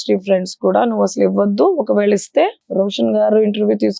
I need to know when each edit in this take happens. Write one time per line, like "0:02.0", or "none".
0:02.6